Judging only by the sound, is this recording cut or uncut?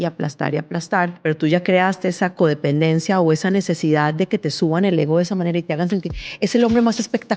cut